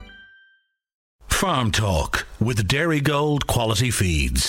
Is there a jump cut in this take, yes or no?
yes